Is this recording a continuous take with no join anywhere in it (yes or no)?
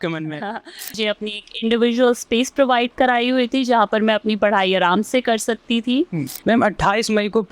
no